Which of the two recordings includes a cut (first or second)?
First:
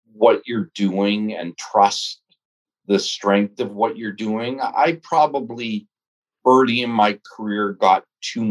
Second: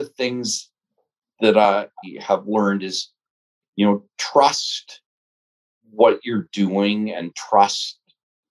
second